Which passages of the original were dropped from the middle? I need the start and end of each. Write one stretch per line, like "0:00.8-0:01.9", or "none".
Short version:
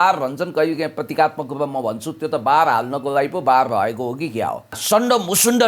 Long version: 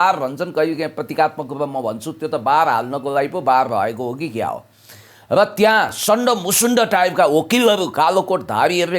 0:04.8-0:05.9